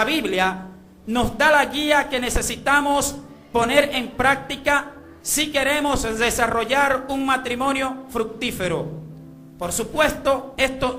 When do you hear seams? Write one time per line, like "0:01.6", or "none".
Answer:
none